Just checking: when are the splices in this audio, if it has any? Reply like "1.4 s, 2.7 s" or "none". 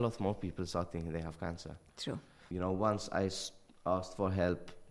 2.4 s